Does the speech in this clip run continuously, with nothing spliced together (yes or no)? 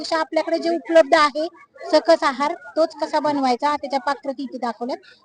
yes